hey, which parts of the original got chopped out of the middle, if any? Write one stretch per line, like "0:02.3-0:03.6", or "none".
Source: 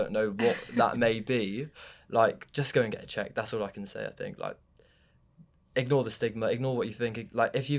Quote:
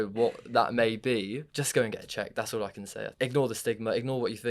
0:01.8-0:02.5
0:04.1-0:05.6